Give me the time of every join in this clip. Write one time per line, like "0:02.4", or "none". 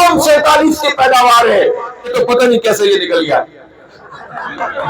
0:02.1